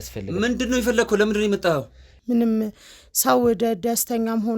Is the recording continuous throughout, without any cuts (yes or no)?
no